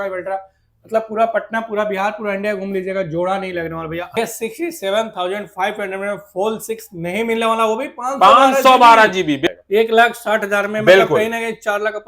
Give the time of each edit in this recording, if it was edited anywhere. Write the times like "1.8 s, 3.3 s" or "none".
4.2 s, 9.5 s